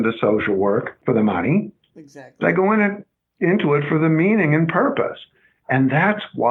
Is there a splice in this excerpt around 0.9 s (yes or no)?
yes